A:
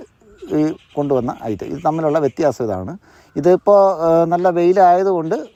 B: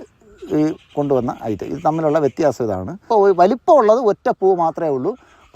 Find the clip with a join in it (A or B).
B